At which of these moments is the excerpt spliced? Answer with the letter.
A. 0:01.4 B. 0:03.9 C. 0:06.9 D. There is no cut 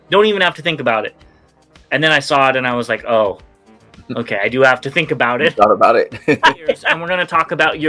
C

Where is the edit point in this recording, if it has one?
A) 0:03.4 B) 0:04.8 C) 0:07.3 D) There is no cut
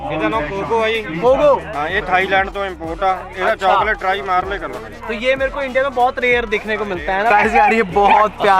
C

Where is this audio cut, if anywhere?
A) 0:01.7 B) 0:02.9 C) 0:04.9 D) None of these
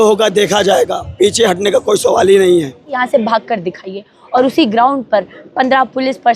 B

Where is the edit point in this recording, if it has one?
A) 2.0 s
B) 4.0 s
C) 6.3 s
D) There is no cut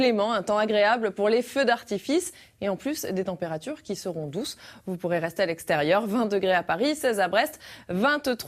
A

